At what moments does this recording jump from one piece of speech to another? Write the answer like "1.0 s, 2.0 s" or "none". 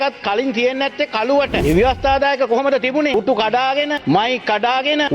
1.6 s, 3.1 s